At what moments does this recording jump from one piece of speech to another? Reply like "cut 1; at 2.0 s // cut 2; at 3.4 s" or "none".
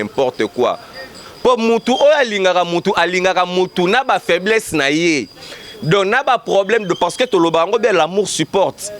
none